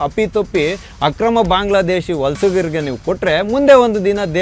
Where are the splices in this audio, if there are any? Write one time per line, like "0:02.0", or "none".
none